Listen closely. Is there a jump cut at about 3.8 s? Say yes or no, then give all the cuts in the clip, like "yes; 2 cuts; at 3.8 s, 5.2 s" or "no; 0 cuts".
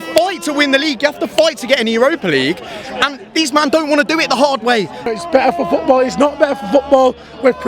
no; 1 cut; at 5.1 s